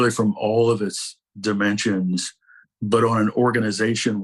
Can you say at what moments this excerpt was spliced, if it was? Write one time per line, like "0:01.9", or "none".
0:02.6

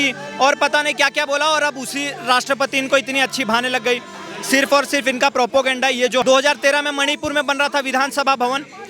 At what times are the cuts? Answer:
0:06.2

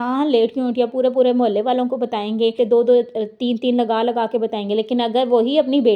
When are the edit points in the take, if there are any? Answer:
0:02.5

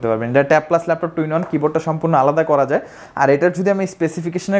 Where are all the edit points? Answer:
none

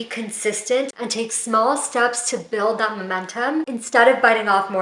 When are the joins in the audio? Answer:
none

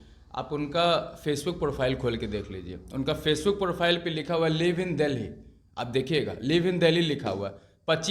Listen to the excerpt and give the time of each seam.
none

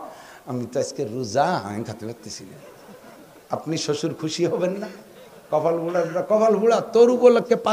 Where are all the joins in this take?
none

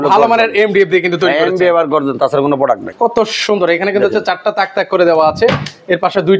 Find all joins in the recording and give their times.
0:02.9

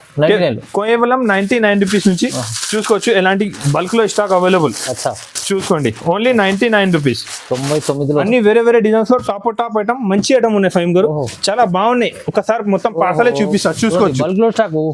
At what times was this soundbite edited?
0:08.2

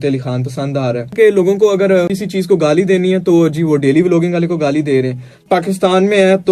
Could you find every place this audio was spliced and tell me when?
0:01.1
0:02.2
0:05.4

